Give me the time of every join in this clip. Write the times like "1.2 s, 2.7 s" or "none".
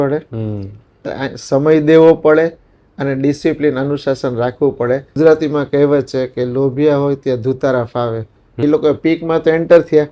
5.2 s, 8.5 s